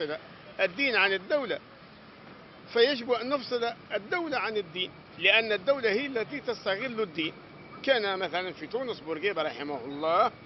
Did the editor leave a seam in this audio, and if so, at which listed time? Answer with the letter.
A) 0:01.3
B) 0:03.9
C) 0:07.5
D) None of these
D